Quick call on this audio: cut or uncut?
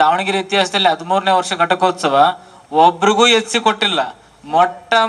uncut